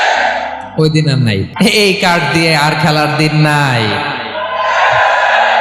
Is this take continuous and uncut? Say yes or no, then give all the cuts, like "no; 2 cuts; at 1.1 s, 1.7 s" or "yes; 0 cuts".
no; 1 cut; at 1.5 s